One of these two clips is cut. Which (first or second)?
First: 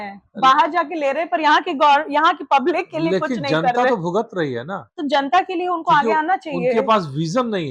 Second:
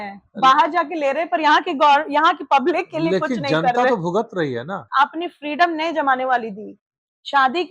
second